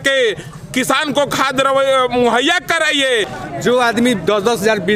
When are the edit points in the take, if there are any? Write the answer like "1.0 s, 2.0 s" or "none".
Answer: 3.4 s